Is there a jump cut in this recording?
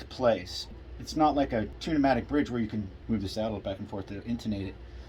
yes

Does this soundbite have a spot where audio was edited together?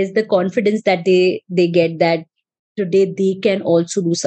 no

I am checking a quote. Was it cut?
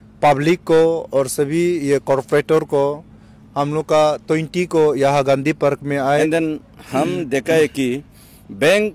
yes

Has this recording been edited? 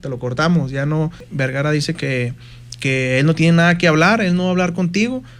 yes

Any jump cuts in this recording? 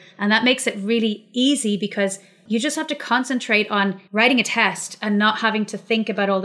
yes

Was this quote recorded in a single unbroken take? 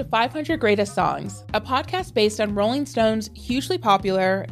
no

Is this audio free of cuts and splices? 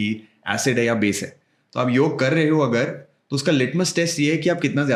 yes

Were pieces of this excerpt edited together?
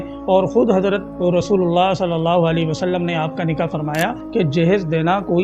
yes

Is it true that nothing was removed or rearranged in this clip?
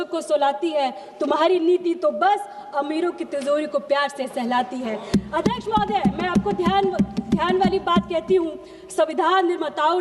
yes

